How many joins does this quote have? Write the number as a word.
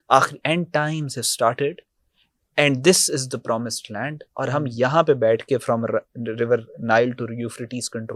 zero